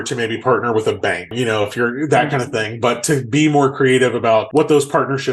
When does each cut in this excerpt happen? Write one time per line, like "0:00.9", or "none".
0:01.3
0:04.5